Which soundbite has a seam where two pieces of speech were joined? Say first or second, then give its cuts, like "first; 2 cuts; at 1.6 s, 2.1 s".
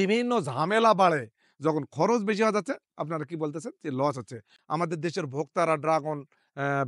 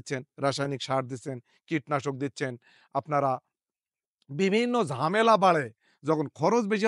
first; 1 cut; at 4.5 s